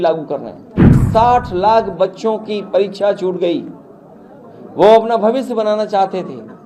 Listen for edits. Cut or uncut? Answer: cut